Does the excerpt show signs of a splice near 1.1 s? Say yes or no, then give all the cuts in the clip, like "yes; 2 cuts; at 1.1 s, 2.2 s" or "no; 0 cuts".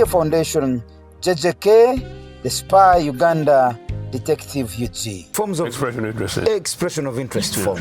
no; 1 cut; at 5.3 s